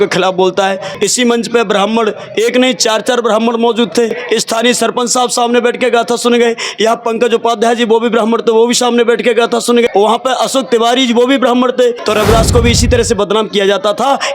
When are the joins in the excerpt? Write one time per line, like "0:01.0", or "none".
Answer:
0:00.9
0:04.2
0:09.9
0:12.0

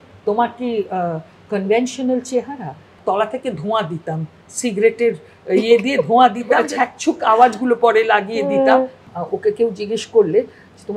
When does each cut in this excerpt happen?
0:03.0
0:06.6
0:09.0

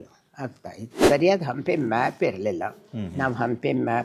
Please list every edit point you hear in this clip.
0:01.0

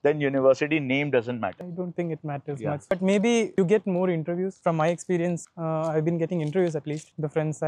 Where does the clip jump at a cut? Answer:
0:01.6
0:04.6

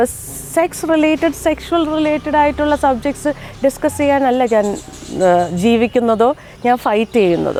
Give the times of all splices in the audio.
none

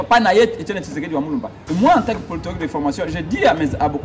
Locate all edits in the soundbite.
0:01.6

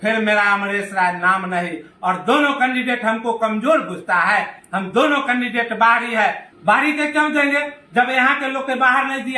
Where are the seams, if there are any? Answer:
0:06.5

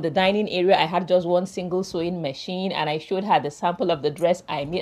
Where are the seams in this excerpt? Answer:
none

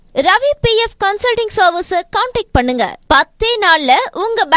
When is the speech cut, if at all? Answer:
none

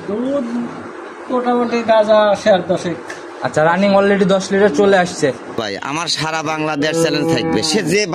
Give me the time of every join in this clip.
0:05.6

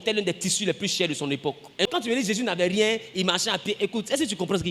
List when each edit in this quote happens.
0:01.9

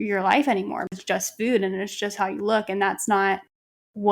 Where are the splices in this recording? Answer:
0:00.9

